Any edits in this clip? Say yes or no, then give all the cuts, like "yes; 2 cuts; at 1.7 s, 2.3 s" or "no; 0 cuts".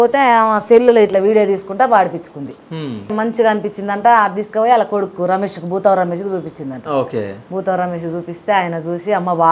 yes; 1 cut; at 3.1 s